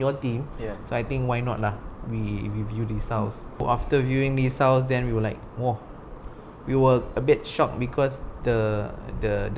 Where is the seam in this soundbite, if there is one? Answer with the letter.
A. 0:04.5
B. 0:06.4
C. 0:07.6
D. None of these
D